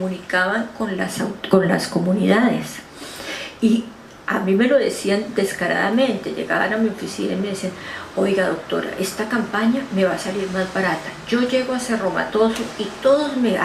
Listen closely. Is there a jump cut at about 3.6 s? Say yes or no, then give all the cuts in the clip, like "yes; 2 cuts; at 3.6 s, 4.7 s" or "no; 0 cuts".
no; 1 cut; at 11.2 s